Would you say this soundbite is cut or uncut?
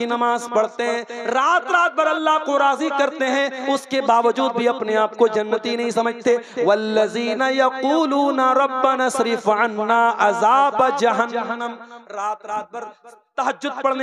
uncut